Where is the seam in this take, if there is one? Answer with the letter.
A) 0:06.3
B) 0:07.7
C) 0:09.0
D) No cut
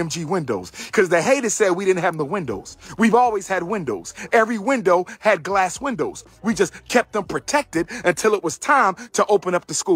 D